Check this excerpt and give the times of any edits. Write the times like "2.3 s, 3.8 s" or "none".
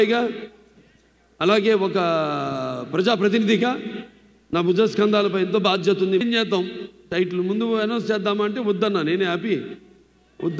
6.2 s